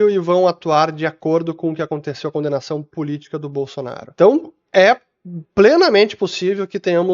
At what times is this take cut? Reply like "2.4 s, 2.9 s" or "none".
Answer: 4.0 s